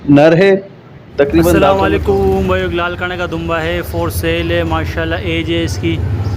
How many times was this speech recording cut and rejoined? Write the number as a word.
one